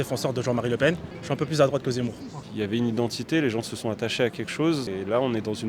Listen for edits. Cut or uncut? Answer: cut